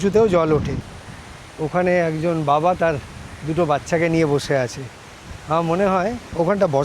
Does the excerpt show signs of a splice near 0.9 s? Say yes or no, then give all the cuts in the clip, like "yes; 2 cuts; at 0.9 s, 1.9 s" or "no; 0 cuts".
yes; 1 cut; at 0.9 s